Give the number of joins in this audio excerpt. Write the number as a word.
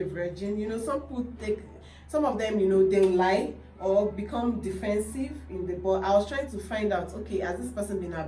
zero